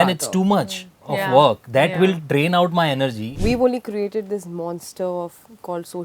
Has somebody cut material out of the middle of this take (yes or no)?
yes